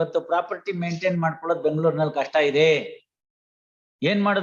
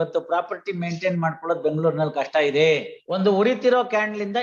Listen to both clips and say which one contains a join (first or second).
second